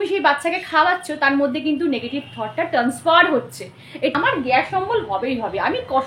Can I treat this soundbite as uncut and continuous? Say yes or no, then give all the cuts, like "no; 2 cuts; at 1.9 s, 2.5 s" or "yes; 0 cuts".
no; 1 cut; at 4.1 s